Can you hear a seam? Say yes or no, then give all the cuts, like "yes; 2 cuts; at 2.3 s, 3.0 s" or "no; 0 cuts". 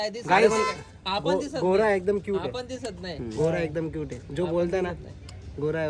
no; 0 cuts